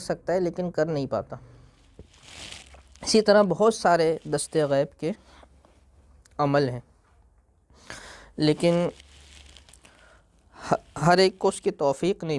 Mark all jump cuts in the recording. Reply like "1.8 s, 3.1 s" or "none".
1.8 s